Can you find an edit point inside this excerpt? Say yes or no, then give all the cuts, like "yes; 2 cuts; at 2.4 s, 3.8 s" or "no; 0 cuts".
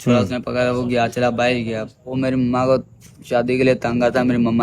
yes; 1 cut; at 2.2 s